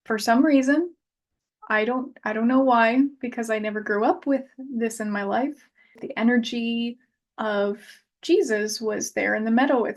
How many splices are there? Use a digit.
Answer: 1